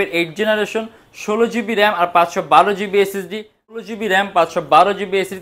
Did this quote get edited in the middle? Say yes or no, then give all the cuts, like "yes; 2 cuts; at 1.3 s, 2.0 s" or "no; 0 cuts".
yes; 1 cut; at 3.8 s